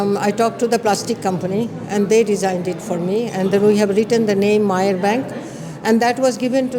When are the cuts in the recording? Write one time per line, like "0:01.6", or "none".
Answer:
none